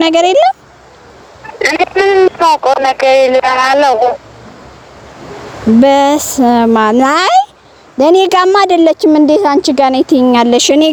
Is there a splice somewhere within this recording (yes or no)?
no